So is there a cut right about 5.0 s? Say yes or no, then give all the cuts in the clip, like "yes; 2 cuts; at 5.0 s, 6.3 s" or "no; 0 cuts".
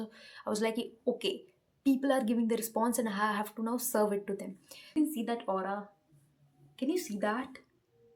yes; 1 cut; at 5.0 s